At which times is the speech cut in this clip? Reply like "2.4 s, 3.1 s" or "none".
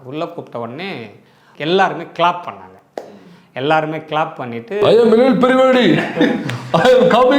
1.4 s